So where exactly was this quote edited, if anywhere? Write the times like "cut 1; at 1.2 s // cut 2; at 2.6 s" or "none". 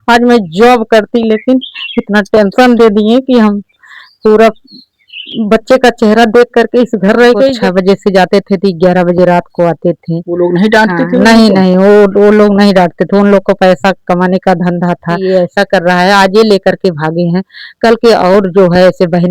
cut 1; at 7.6 s // cut 2; at 15.2 s